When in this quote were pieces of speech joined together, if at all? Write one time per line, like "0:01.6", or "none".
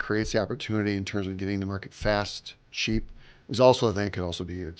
none

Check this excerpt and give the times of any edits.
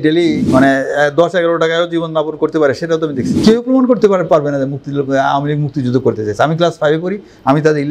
0:03.3

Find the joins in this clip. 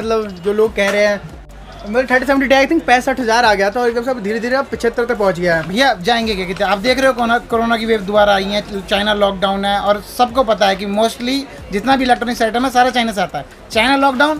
0:01.3

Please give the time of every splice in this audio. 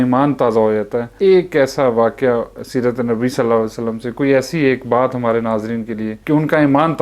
0:01.1
0:06.1

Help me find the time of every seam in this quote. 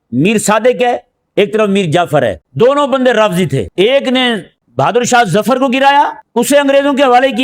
0:02.4
0:03.7
0:04.6
0:06.2

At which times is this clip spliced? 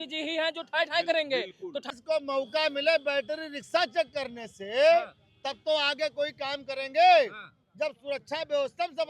0:01.9

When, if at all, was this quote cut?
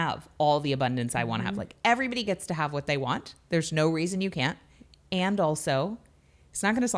none

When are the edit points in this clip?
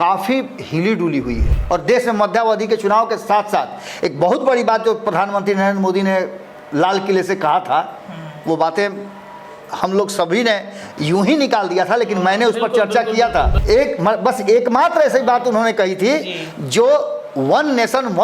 0:01.5
0:13.6

